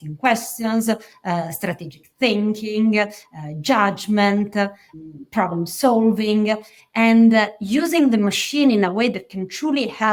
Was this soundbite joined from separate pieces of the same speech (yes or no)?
no